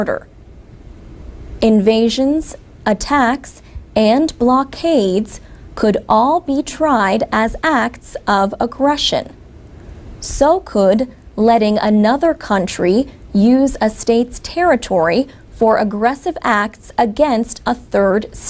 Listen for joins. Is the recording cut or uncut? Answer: cut